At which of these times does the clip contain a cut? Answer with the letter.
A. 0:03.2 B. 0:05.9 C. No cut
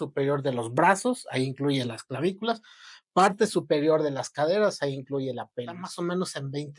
B